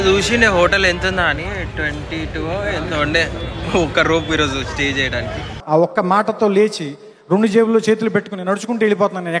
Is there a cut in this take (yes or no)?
no